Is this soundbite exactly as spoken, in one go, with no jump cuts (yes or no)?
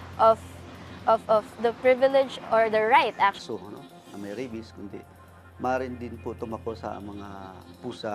yes